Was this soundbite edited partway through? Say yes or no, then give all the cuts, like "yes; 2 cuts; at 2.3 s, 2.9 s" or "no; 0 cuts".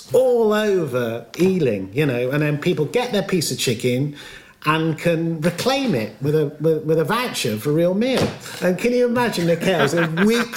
yes; 1 cut; at 8.5 s